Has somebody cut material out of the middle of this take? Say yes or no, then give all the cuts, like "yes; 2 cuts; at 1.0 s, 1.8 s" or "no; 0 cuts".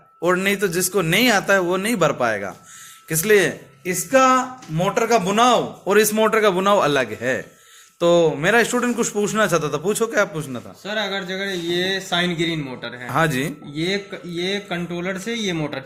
no; 0 cuts